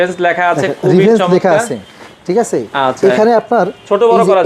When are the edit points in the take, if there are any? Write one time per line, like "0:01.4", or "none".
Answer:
none